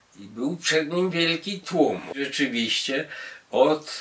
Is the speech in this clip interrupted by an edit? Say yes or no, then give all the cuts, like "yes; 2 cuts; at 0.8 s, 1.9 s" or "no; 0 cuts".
yes; 1 cut; at 2.2 s